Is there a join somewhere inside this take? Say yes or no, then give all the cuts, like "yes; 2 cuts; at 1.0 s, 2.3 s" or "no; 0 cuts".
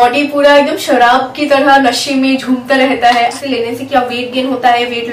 yes; 1 cut; at 3.4 s